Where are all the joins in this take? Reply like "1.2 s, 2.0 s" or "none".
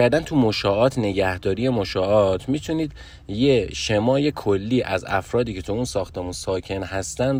none